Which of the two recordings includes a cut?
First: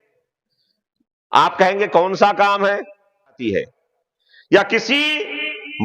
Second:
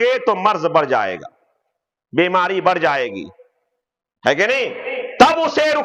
first; 1 cut; at 3.4 s

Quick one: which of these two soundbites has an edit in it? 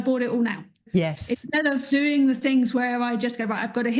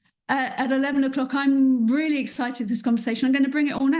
first; 2 cuts; at 0.8 s, 1.8 s

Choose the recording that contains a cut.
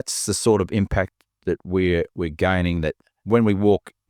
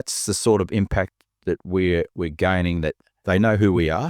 second; 1 cut; at 3.1 s

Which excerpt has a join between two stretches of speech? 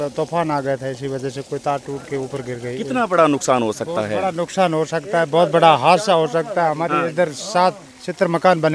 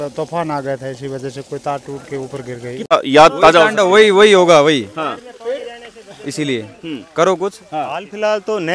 second; 1 cut; at 2.9 s

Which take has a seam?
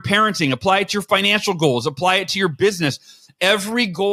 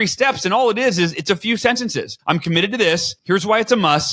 second; 2 cuts; at 2.1 s, 3.1 s

